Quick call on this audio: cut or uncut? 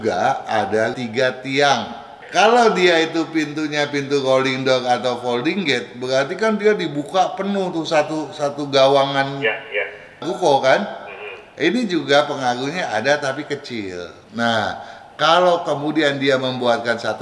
cut